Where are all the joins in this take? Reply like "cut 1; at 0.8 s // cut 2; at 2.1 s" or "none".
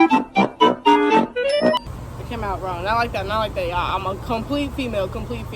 cut 1; at 1.8 s